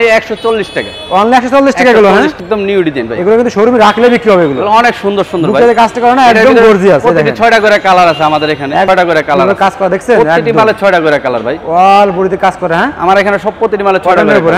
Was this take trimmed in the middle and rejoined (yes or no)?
yes